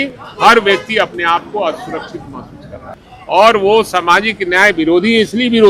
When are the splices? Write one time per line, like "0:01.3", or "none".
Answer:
0:02.9